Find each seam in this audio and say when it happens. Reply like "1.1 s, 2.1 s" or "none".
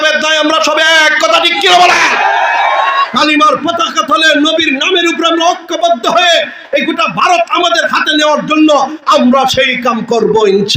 none